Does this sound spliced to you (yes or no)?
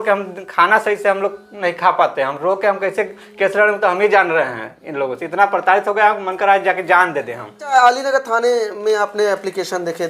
yes